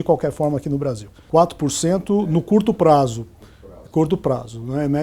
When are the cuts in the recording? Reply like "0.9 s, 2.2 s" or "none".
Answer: 1.1 s